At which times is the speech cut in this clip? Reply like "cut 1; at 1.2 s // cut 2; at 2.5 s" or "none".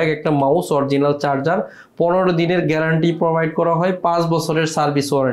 none